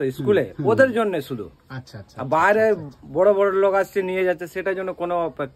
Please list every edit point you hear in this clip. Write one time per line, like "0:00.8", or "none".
none